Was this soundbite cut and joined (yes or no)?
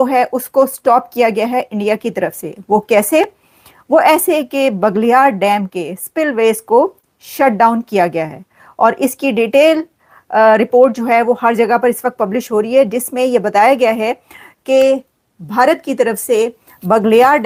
no